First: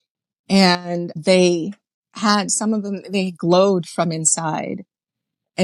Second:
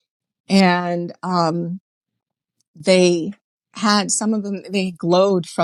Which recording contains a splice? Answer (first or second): first